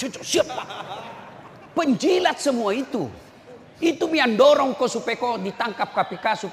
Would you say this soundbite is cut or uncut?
uncut